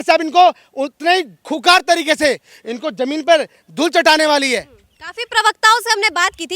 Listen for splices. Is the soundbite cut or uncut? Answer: uncut